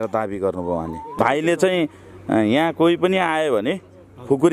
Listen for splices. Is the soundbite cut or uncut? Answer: cut